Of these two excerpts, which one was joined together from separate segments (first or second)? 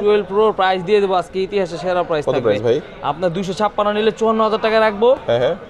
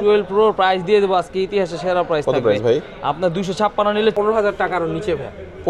second